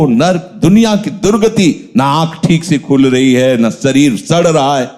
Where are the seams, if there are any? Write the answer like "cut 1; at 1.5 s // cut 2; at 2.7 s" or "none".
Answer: none